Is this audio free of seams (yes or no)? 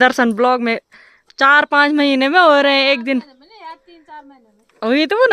yes